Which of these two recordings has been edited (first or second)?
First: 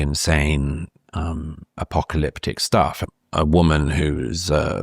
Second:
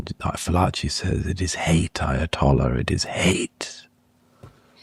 first